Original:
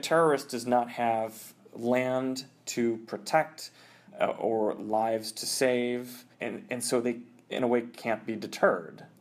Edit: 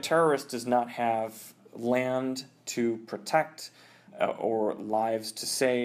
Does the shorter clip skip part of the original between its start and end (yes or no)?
no